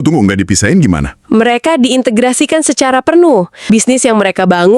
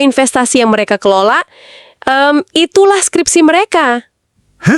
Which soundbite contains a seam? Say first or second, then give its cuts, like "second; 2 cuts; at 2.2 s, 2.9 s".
first; 1 cut; at 3.5 s